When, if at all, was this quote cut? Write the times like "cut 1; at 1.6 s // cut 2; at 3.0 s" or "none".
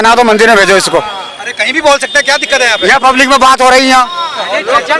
none